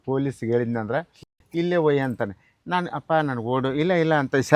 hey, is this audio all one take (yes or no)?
yes